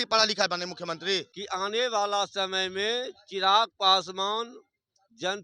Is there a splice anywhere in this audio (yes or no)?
yes